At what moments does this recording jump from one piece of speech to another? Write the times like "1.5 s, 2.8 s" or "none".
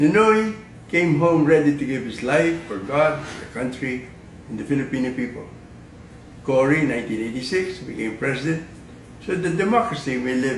9.4 s